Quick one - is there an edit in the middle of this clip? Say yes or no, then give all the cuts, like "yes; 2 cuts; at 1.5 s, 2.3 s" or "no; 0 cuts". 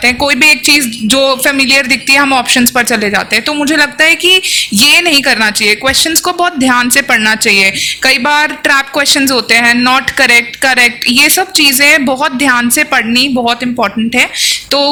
no; 0 cuts